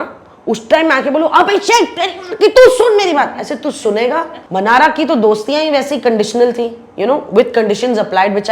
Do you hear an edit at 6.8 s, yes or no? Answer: no